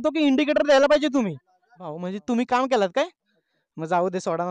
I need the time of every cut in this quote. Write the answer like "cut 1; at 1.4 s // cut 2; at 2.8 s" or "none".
cut 1; at 1.9 s